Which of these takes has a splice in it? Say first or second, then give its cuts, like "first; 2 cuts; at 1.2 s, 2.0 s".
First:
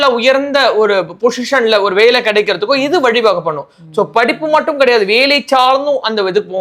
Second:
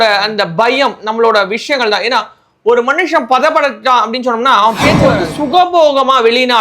second; 1 cut; at 5.2 s